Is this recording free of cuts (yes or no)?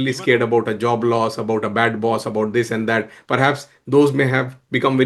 yes